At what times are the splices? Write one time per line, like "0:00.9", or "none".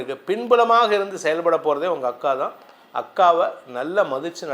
none